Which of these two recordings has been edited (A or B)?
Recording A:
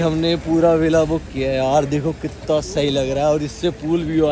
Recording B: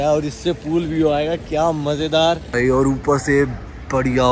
B